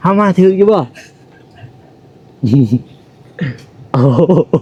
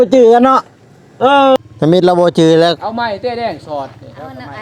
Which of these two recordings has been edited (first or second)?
second